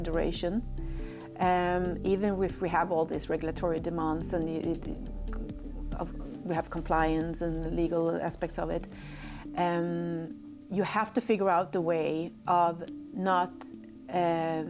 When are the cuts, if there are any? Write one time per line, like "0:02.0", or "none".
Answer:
none